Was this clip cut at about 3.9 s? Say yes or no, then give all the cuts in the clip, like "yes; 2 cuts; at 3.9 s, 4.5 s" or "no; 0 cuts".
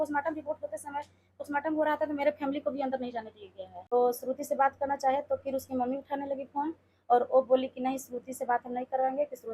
yes; 1 cut; at 3.9 s